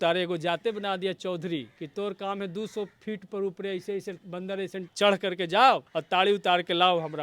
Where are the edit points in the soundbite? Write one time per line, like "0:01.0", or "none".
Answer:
0:01.8
0:04.4
0:05.9